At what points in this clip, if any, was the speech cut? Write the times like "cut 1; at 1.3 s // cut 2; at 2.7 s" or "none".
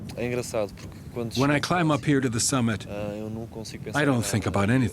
cut 1; at 1.4 s